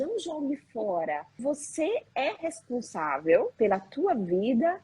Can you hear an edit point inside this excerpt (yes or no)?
yes